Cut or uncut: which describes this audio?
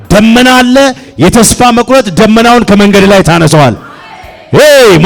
uncut